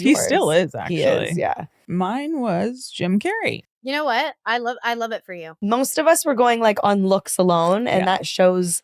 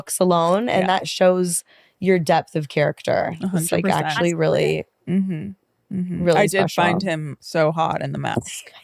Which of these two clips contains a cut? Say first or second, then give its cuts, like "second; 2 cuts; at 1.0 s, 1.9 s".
first; 3 cuts; at 1.8 s, 3.7 s, 5.3 s